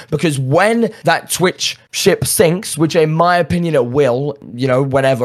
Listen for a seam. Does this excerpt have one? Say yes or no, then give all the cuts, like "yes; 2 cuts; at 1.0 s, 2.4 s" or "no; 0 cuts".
no; 0 cuts